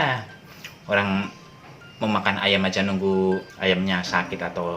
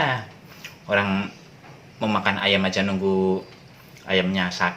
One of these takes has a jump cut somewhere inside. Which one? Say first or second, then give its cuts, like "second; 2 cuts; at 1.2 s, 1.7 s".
first; 1 cut; at 3.5 s